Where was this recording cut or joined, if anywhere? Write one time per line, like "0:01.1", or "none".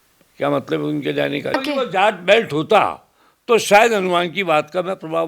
0:01.6